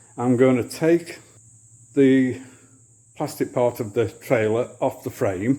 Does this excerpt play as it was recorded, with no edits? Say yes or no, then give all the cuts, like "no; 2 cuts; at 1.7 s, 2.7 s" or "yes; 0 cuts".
yes; 0 cuts